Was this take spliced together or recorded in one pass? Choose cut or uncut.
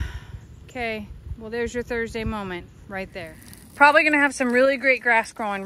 cut